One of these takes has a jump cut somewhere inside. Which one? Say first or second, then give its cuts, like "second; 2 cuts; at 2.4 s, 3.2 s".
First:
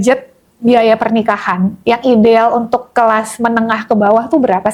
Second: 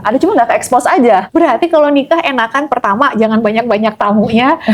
second; 1 cut; at 1.3 s